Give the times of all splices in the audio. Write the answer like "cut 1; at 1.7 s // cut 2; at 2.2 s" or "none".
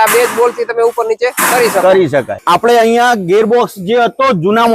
cut 1; at 2.3 s